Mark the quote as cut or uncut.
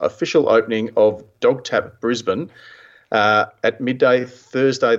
uncut